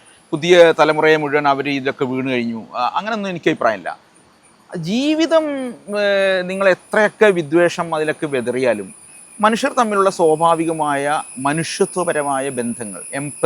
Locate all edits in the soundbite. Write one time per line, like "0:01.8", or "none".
none